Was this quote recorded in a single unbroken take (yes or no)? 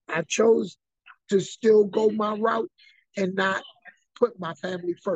yes